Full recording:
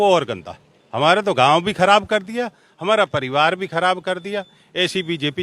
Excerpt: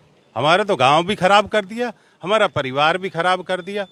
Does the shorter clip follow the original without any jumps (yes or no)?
yes